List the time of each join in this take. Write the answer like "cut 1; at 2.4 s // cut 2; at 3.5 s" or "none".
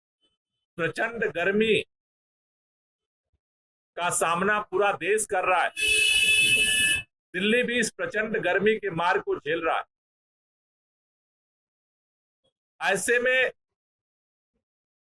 none